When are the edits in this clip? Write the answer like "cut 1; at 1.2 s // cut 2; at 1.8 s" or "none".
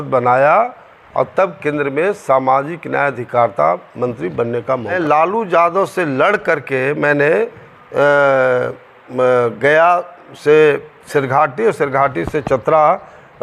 cut 1; at 4.9 s